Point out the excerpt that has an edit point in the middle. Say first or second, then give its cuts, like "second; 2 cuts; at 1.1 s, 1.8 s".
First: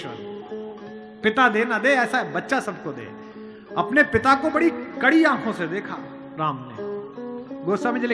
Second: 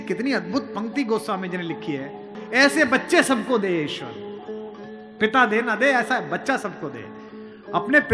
second; 1 cut; at 2.3 s